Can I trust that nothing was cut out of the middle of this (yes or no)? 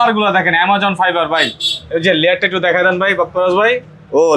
yes